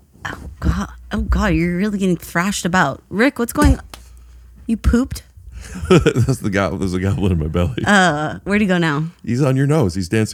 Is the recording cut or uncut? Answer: uncut